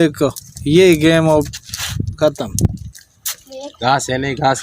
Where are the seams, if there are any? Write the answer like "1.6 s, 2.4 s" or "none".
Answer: 3.7 s